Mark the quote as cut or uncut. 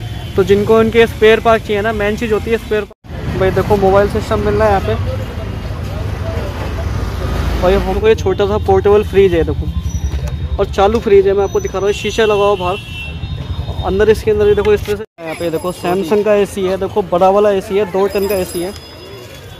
cut